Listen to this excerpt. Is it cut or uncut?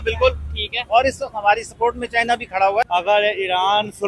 cut